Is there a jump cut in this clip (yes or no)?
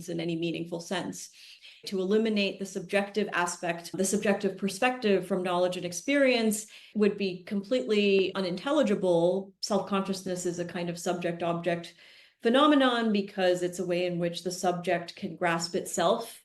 yes